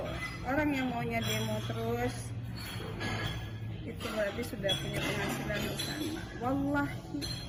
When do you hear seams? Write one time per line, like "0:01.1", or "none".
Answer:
none